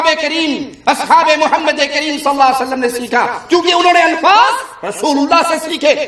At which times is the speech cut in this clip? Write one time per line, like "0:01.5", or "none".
none

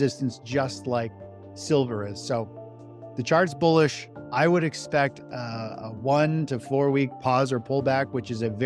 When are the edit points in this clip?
none

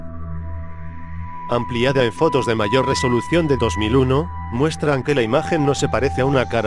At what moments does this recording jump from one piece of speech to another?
0:03.9

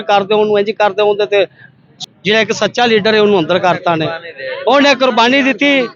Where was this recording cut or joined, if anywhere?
0:01.9

